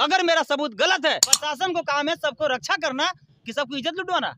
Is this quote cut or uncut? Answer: cut